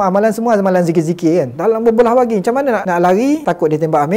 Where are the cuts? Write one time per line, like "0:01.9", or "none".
0:01.6
0:02.8